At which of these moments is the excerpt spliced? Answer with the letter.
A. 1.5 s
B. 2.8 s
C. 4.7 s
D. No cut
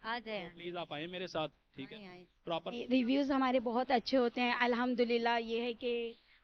B